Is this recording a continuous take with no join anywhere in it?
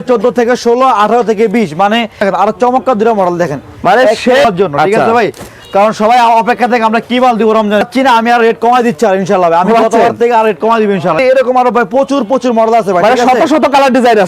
no; 4 cuts; at 2.2 s, 4.4 s, 7.9 s, 11.2 s

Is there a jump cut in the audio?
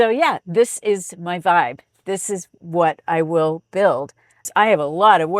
yes; 1 cut; at 4.5 s

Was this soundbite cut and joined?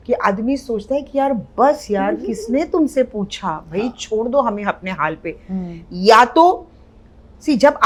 no; 0 cuts

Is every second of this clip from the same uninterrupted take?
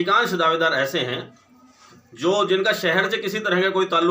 yes; 0 cuts

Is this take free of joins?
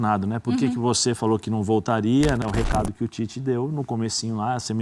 no; 1 cut; at 2.4 s

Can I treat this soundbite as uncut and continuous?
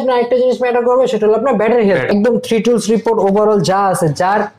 no; 1 cut; at 2.1 s

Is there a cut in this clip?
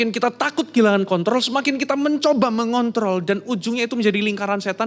no; 0 cuts

